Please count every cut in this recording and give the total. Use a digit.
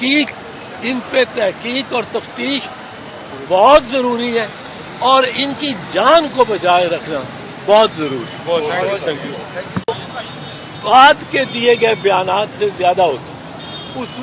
1